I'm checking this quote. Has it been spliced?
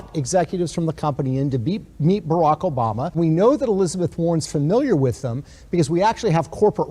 yes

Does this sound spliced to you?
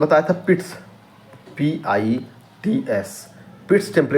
no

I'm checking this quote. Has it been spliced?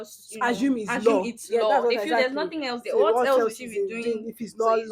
no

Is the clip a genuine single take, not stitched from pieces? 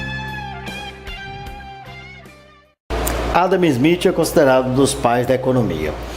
yes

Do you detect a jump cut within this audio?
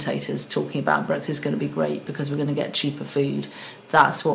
no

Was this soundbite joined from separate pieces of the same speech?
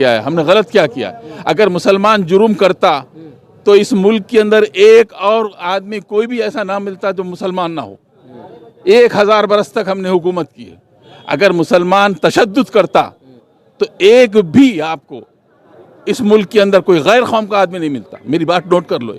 no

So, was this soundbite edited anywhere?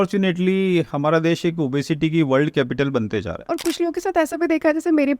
yes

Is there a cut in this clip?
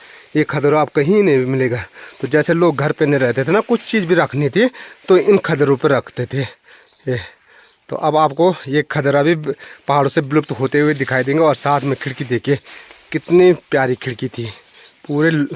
no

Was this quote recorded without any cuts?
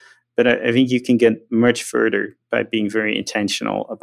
yes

